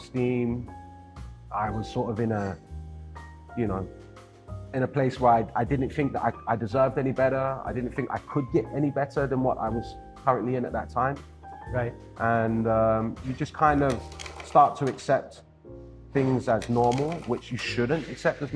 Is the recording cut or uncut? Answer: uncut